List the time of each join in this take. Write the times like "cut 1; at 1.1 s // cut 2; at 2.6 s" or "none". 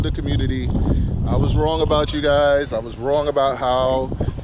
none

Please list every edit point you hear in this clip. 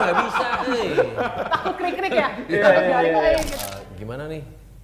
cut 1; at 3.6 s

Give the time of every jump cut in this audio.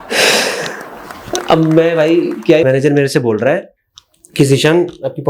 cut 1; at 2.6 s

